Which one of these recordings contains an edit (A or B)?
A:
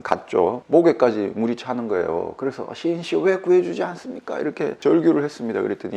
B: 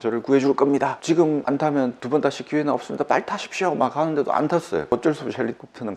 B